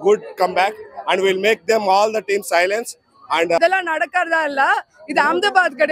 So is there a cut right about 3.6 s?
yes; 1 cut; at 3.6 s

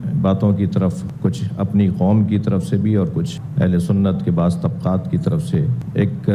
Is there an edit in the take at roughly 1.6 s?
no; 0 cuts

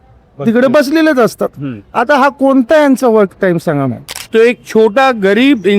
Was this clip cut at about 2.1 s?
no; 1 cut; at 4.1 s

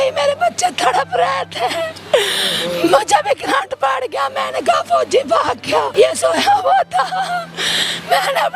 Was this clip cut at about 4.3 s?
no; 1 cut; at 5.9 s

